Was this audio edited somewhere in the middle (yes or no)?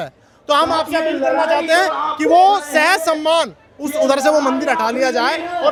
no